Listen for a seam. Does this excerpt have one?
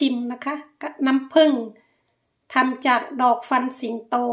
no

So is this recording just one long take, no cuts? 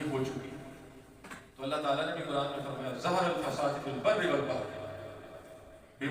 yes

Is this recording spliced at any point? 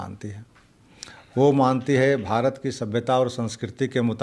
no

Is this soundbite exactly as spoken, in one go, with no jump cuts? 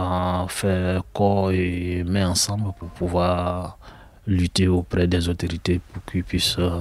yes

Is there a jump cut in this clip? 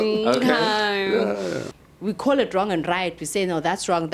yes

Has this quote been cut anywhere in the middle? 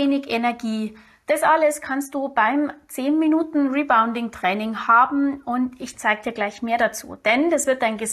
no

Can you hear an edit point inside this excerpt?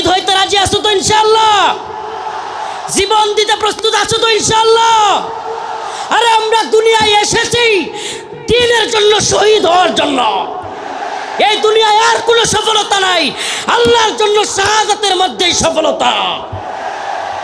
no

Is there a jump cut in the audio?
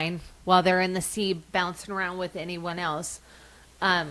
no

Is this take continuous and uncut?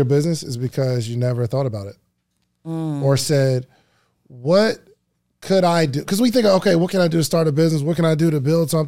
yes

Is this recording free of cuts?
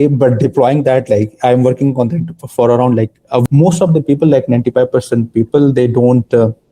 no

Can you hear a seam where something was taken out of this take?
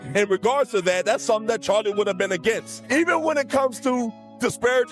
yes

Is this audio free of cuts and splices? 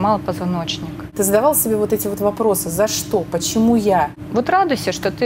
no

